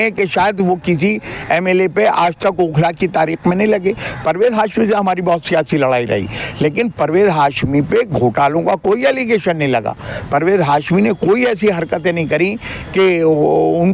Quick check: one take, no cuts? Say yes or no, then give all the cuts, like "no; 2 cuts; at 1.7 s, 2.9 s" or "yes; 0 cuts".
yes; 0 cuts